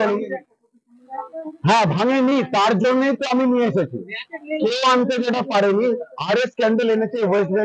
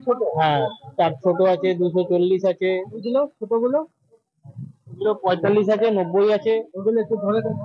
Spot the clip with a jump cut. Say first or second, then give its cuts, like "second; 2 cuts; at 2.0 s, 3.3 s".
second; 1 cut; at 3.0 s